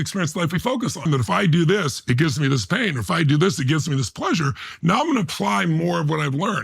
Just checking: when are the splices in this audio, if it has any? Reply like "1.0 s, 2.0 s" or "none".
1.1 s